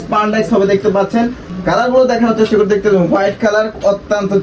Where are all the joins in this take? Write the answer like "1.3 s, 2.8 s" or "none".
1.8 s